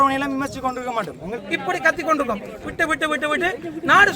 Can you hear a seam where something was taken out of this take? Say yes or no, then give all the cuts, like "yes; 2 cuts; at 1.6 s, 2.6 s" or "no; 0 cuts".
yes; 1 cut; at 1.4 s